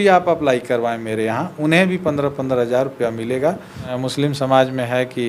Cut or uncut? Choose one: cut